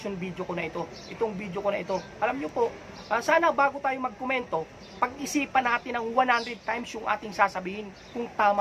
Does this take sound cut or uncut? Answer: uncut